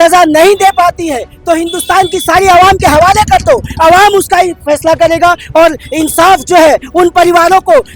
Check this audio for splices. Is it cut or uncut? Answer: uncut